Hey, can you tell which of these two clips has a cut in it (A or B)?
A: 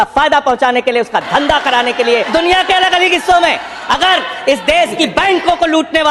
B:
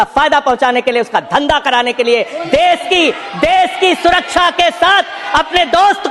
A